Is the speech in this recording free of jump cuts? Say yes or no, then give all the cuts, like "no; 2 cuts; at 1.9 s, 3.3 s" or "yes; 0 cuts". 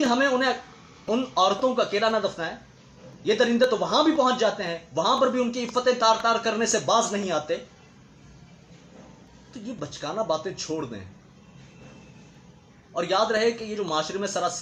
yes; 0 cuts